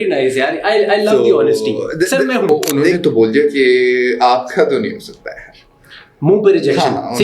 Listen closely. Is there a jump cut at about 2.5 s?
yes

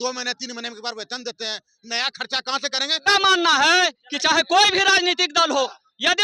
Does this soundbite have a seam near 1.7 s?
no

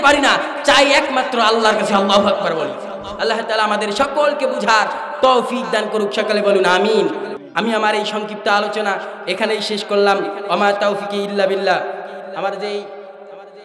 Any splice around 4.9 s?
no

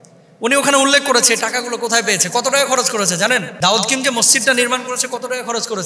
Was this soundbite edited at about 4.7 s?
no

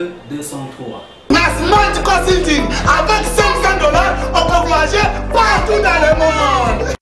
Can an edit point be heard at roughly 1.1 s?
yes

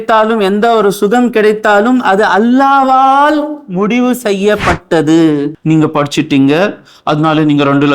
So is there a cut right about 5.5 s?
yes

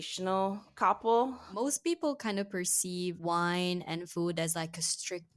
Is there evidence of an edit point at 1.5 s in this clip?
yes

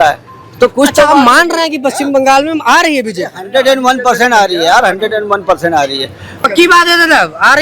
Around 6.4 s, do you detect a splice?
yes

